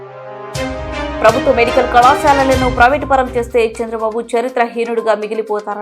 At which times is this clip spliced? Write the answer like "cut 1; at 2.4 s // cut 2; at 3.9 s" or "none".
cut 1; at 1.2 s